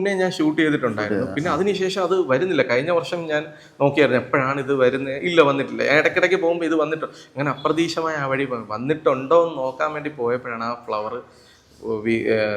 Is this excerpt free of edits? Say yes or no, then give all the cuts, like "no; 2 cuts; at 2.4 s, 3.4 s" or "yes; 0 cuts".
yes; 0 cuts